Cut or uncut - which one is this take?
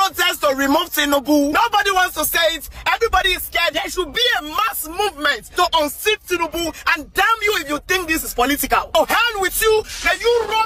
uncut